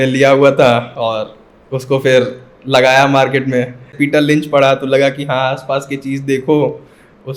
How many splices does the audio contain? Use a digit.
1